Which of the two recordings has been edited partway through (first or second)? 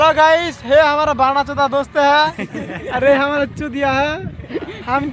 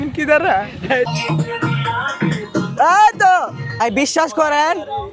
second